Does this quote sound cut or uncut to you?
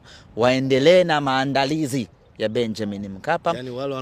uncut